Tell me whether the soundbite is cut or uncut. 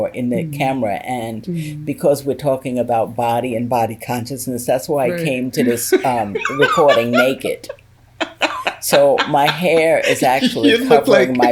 uncut